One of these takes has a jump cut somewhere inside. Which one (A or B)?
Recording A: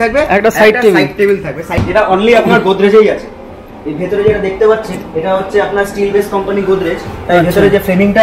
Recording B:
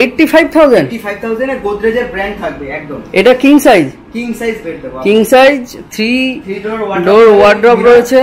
A